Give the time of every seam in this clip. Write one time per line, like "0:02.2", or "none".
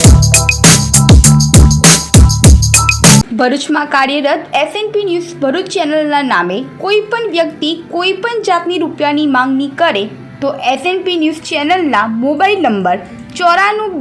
0:03.3